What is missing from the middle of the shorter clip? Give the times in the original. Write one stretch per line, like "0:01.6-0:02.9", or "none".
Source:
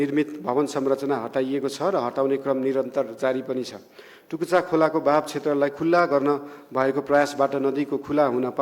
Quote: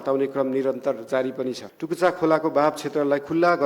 0:03.8-0:04.2